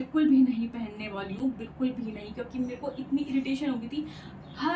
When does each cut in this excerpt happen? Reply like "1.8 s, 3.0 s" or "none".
none